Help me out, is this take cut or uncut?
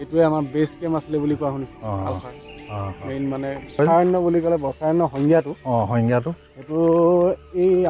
cut